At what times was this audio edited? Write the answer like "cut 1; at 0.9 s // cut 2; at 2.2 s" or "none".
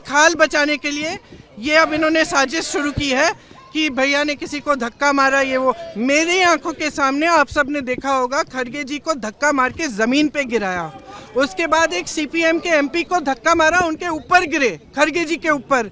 none